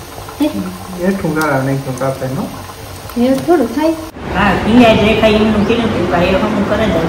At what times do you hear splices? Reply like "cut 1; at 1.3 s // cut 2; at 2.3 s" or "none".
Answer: cut 1; at 4.2 s